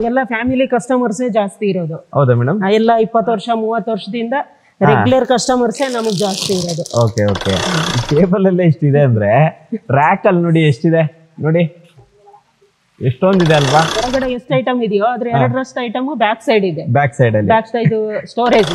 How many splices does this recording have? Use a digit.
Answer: 2